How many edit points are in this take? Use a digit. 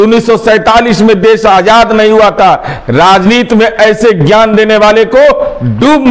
0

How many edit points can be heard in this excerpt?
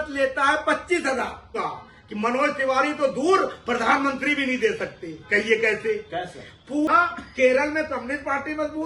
2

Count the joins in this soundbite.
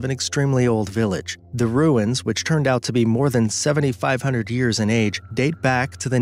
0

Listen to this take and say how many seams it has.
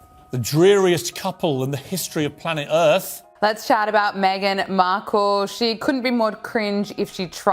1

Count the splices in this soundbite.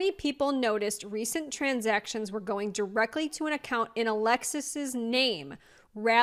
0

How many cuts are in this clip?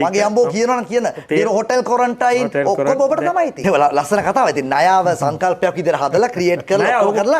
1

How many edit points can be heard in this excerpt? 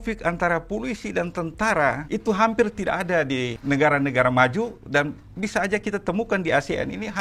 2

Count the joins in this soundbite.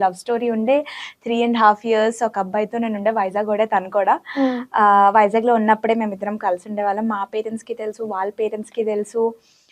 0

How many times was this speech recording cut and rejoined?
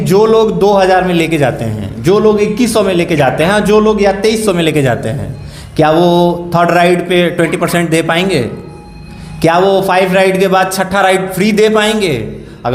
0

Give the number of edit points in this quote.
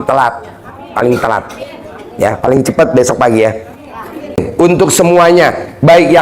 1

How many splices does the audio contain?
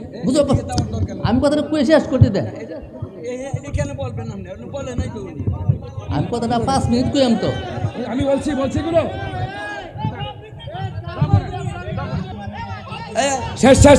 1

